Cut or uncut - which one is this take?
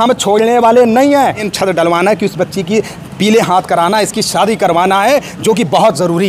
cut